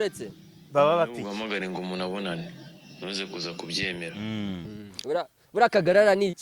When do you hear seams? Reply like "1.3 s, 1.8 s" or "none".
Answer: 4.1 s